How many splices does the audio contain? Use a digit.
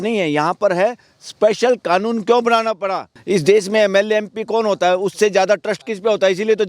1